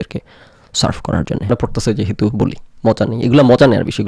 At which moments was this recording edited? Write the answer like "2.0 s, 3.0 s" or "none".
1.5 s